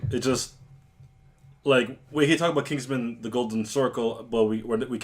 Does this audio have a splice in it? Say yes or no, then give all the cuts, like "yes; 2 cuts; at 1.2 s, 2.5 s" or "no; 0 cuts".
yes; 1 cut; at 2.8 s